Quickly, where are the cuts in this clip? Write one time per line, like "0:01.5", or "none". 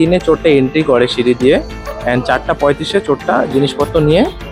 none